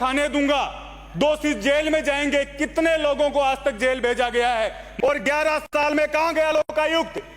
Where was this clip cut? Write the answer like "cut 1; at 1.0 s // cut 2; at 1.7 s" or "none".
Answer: cut 1; at 4.8 s